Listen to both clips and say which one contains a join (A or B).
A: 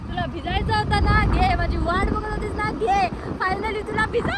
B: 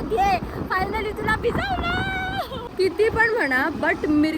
B